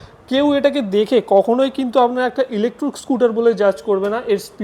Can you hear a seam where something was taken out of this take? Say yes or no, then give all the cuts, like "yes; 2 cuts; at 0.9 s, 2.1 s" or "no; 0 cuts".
no; 0 cuts